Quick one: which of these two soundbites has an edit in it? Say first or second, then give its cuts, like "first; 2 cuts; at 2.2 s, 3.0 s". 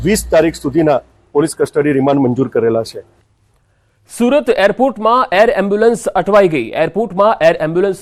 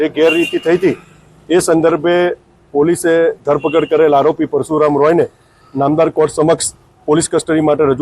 second; 1 cut; at 4.8 s